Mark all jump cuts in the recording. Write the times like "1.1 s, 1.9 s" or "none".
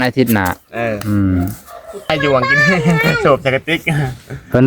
2.1 s